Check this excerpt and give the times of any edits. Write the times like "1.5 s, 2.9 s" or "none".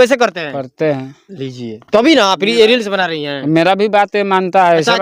none